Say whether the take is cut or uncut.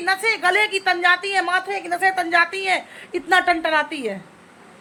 uncut